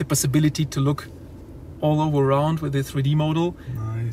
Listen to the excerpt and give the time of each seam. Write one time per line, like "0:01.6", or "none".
none